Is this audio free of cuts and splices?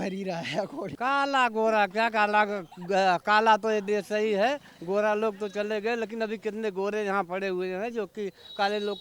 no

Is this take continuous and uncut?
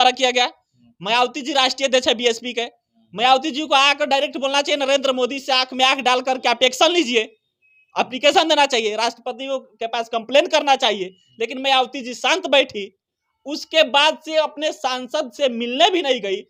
yes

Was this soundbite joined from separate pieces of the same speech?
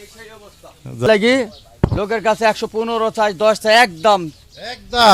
yes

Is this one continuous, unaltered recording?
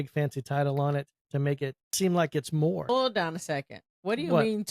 no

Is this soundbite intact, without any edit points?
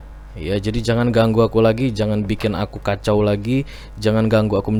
yes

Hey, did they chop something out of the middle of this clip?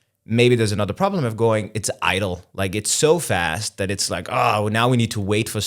no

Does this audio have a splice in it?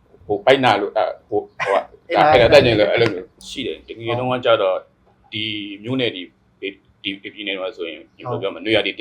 yes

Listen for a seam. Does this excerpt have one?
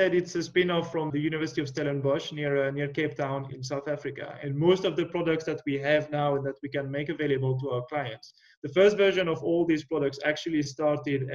yes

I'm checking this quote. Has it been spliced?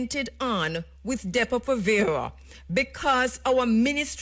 no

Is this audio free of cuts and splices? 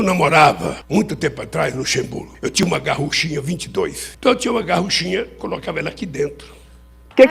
no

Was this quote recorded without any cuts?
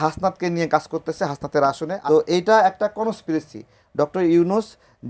no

